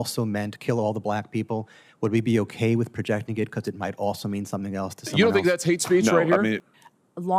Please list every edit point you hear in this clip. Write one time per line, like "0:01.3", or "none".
0:05.1